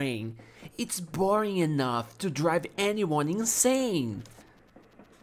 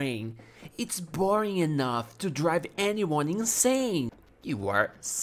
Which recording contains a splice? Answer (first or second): second